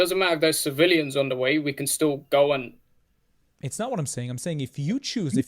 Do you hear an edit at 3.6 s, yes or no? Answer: yes